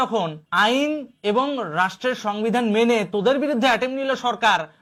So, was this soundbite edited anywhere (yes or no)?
no